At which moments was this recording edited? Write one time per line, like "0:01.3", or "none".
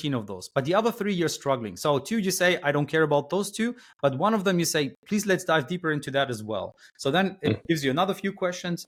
none